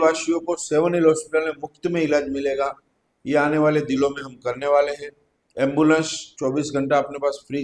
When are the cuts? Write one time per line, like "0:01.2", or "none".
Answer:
none